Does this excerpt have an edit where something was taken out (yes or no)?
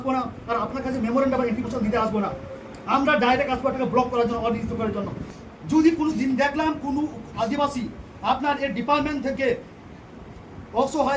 yes